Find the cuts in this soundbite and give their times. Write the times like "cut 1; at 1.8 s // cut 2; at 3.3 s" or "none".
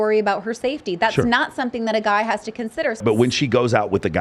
cut 1; at 3.0 s